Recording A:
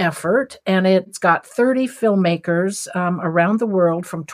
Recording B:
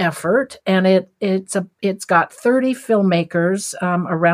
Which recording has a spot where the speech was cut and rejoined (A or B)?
A